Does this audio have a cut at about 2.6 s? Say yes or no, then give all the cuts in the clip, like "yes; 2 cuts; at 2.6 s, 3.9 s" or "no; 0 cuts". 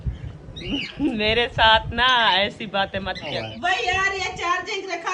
no; 1 cut; at 3.9 s